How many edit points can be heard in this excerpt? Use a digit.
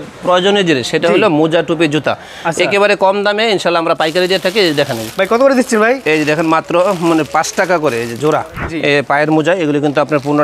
1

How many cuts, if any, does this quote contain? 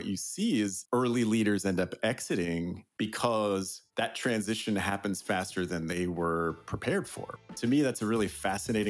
3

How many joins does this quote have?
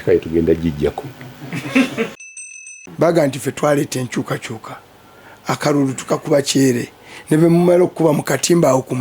1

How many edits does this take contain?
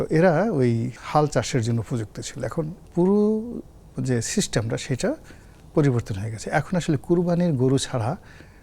2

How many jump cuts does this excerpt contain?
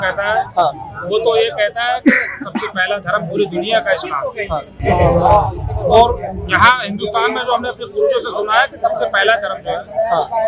0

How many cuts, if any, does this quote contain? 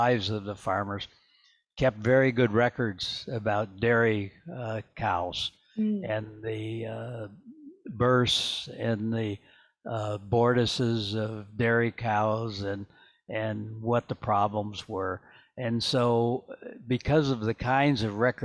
0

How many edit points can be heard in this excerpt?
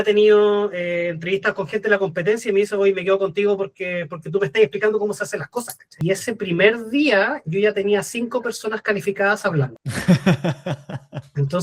2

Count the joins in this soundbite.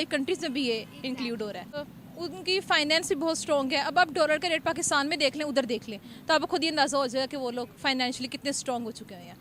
0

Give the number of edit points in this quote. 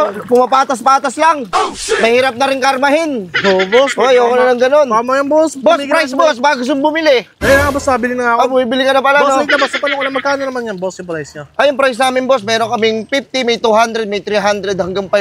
0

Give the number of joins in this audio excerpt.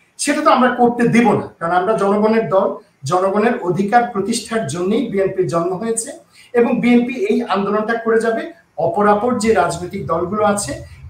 0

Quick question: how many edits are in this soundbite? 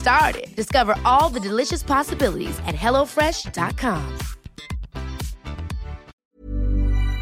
1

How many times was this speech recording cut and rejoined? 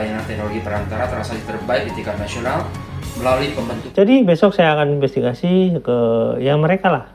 1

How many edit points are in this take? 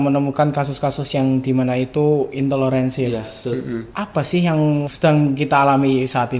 2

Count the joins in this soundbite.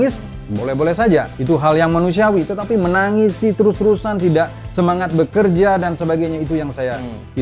1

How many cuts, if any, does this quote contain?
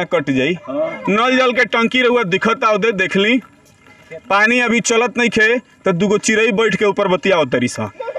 1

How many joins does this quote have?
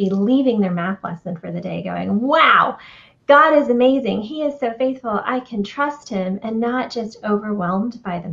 0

